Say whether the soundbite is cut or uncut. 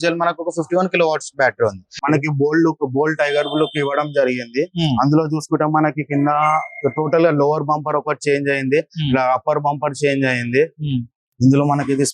cut